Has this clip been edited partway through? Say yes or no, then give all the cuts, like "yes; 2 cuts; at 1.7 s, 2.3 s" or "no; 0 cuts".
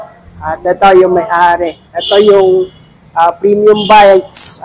no; 0 cuts